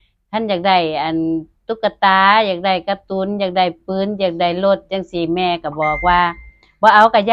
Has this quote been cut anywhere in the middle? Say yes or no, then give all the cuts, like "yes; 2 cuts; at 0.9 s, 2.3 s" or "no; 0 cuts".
no; 0 cuts